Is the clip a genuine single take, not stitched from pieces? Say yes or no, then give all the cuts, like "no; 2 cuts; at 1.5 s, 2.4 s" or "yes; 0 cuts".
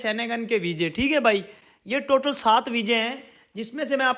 yes; 0 cuts